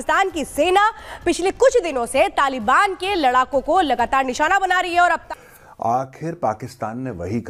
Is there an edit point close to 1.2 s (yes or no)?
no